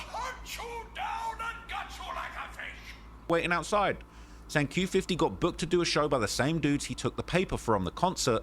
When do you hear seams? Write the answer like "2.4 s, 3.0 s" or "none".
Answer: 3.3 s